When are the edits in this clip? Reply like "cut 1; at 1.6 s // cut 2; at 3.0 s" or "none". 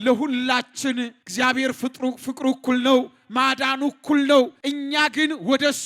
cut 1; at 1.2 s // cut 2; at 4.6 s

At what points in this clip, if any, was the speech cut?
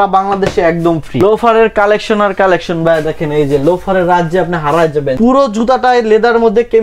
cut 1; at 1.2 s // cut 2; at 5.1 s

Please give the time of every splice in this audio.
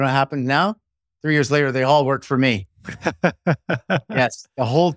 none

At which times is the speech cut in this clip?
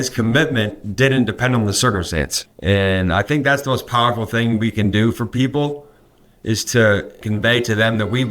cut 1; at 2.4 s // cut 2; at 7.2 s

